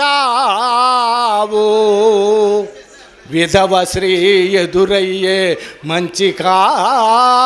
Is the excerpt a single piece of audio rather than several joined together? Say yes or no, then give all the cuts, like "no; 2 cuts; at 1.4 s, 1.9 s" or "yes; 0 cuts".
yes; 0 cuts